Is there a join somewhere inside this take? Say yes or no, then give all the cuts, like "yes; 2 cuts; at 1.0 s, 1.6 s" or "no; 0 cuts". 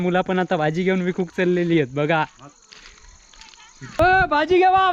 yes; 1 cut; at 4.0 s